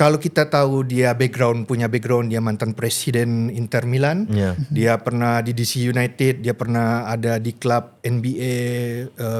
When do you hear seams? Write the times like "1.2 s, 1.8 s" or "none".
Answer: none